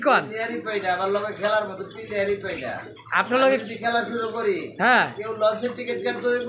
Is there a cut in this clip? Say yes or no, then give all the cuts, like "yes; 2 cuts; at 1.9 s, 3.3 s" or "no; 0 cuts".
no; 0 cuts